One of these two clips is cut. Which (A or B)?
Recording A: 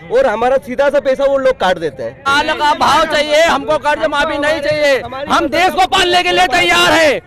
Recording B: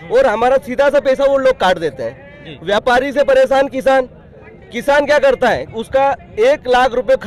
A